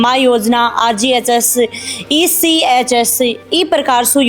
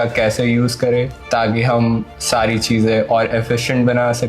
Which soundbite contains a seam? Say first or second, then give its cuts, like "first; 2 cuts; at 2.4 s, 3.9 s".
second; 1 cut; at 1.2 s